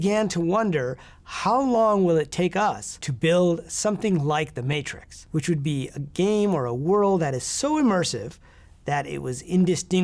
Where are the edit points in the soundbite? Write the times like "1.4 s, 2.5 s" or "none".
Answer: none